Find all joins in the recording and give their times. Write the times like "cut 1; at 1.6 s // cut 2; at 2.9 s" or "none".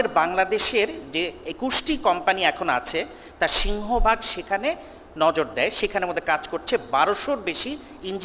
none